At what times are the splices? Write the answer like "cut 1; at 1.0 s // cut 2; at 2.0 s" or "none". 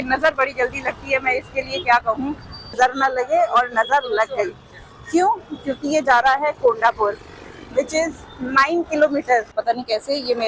cut 1; at 2.7 s // cut 2; at 9.5 s